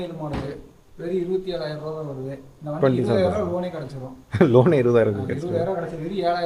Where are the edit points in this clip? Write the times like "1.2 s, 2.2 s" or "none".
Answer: none